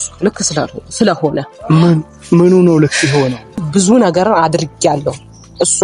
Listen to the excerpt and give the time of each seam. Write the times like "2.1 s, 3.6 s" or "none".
3.6 s